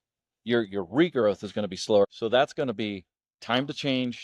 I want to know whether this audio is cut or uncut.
cut